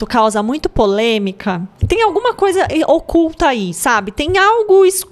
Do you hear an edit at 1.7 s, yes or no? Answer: yes